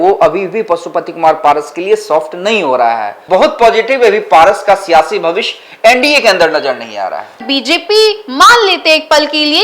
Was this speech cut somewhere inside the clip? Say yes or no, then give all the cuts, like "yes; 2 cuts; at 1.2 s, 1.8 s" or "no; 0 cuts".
yes; 2 cuts; at 3.1 s, 7.4 s